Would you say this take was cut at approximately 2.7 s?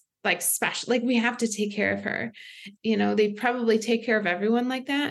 yes; 1 cut; at 2.7 s

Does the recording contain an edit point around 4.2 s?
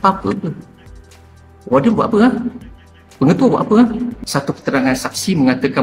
yes; 1 cut; at 4.2 s

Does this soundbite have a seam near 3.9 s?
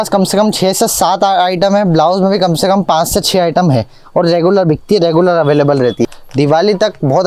no; 1 cut; at 6.2 s

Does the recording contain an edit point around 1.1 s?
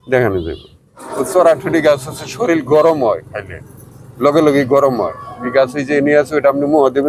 yes; 1 cut; at 1.1 s

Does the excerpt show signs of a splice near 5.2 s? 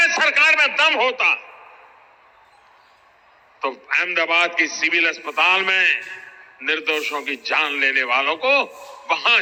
no; 0 cuts

